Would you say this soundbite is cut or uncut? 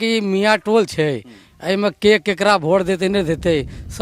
uncut